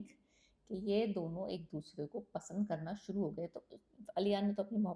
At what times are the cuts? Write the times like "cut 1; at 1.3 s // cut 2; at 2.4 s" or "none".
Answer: none